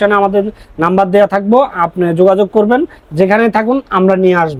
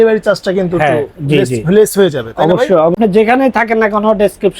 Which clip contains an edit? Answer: second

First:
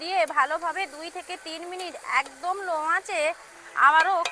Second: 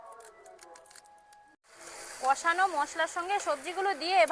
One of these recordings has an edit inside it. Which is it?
second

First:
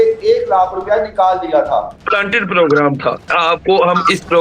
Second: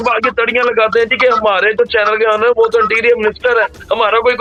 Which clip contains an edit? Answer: first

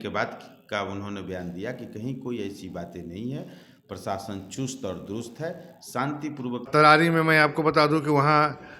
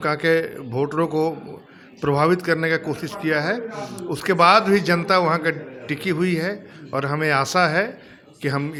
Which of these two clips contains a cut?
first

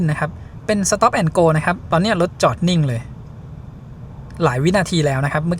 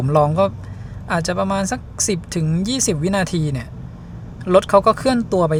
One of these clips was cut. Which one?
first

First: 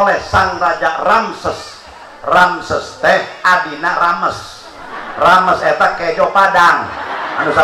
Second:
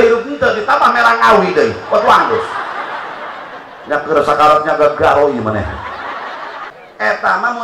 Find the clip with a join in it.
second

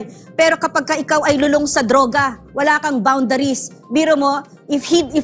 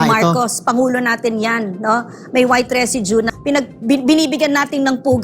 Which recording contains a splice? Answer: second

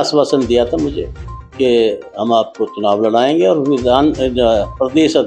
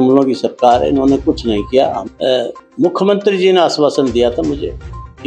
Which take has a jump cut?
second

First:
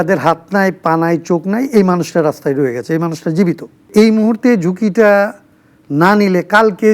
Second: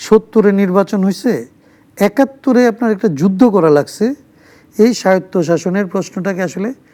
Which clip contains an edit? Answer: first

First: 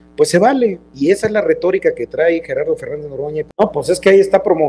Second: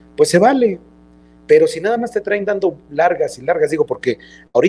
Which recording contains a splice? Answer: first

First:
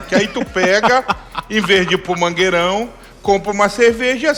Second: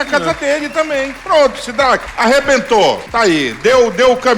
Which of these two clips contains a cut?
second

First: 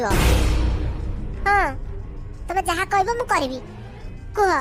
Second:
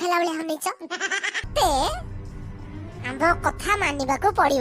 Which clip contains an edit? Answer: second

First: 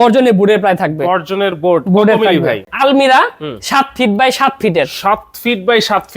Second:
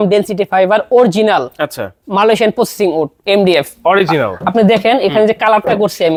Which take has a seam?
first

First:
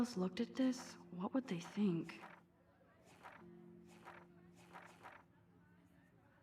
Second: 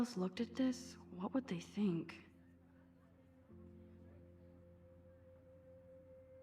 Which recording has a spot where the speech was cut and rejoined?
second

